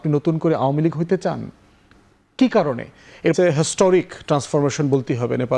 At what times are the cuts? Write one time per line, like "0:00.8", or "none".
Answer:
0:03.3